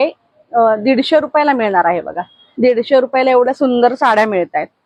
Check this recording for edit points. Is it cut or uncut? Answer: uncut